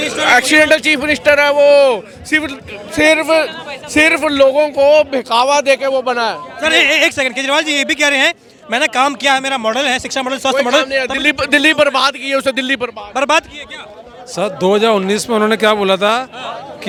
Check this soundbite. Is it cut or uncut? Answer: uncut